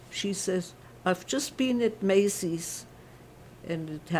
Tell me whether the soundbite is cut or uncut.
uncut